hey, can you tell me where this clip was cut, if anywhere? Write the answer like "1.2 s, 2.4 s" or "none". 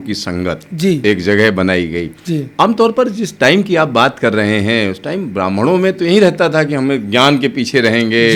none